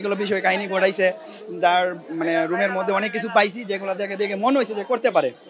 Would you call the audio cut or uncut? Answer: uncut